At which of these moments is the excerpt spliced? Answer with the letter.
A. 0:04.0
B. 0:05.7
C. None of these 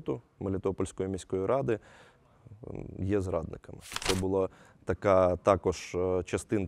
A